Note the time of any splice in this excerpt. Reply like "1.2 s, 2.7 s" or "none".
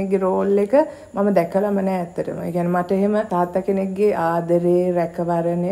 3.3 s